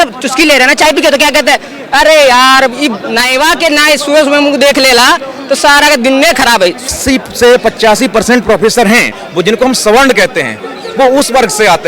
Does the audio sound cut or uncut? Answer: cut